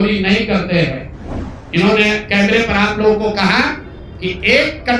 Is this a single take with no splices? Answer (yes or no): no